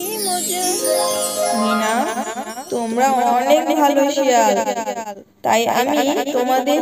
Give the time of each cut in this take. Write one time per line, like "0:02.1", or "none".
0:00.7
0:01.6